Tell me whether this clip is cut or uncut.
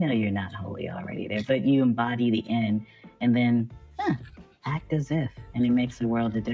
uncut